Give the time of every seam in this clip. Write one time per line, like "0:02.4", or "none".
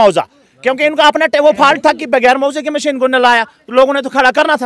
none